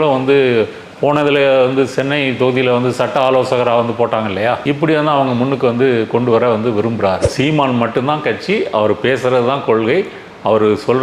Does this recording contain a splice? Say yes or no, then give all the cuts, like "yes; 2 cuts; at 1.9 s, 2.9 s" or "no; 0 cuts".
yes; 1 cut; at 7.3 s